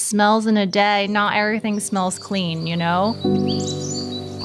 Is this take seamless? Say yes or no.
no